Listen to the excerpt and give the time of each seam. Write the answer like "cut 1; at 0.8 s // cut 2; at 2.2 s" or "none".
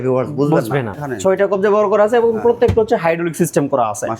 cut 1; at 1.0 s